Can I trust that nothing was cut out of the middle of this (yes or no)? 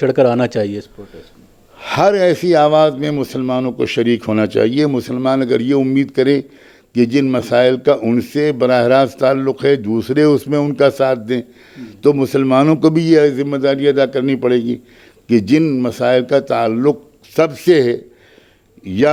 yes